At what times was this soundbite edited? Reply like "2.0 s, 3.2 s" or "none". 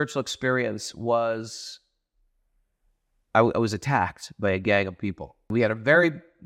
5.4 s